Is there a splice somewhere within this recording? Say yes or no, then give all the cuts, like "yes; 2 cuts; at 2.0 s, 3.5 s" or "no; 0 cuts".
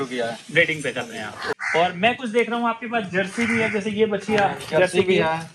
yes; 1 cut; at 1.5 s